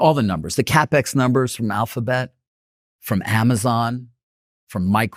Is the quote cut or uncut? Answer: uncut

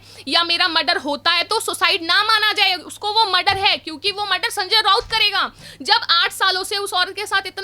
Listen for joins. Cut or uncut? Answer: uncut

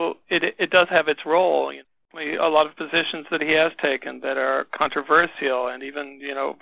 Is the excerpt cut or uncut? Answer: cut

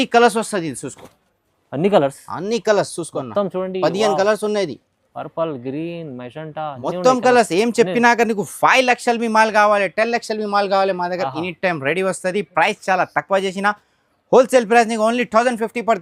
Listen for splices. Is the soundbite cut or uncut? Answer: uncut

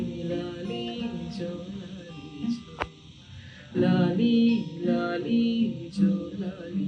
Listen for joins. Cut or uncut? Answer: uncut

